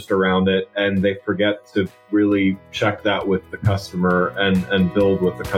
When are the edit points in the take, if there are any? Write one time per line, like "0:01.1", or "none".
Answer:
none